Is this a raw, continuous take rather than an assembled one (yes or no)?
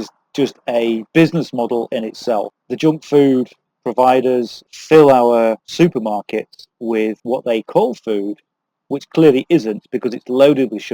no